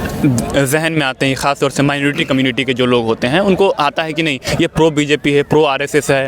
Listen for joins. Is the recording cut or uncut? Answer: uncut